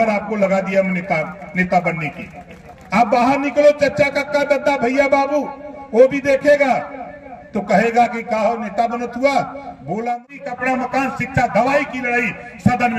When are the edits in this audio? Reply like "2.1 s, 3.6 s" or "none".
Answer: 10.4 s